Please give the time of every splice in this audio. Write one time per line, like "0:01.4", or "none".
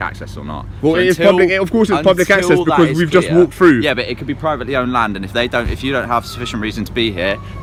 none